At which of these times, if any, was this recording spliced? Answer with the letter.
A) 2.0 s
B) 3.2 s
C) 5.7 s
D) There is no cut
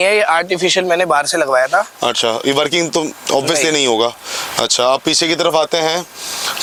D